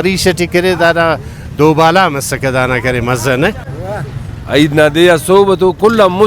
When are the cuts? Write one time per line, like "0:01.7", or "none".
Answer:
0:03.7